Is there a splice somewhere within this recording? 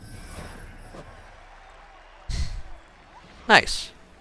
no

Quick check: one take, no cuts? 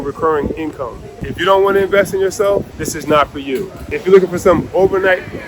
no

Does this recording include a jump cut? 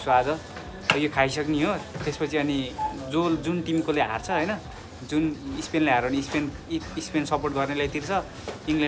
no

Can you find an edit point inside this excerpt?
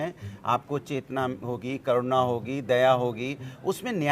no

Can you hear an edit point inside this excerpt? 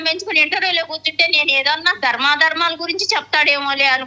yes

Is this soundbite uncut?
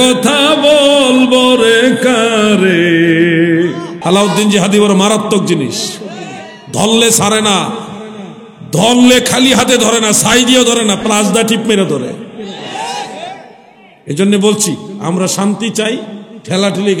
no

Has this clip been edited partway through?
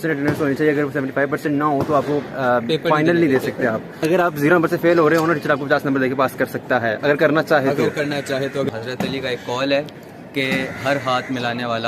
yes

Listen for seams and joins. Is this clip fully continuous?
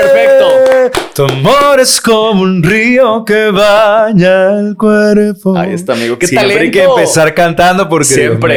yes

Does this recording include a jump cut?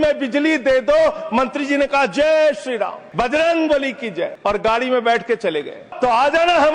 yes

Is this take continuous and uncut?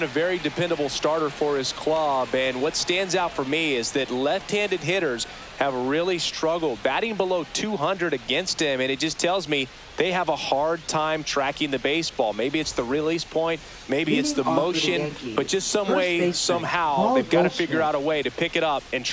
yes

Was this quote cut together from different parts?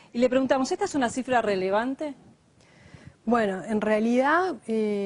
yes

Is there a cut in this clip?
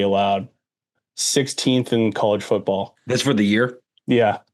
yes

